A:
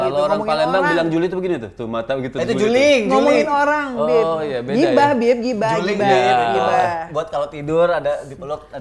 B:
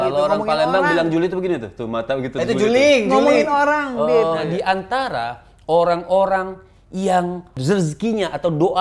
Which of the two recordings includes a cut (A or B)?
B